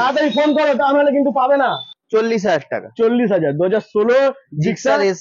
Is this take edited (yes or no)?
yes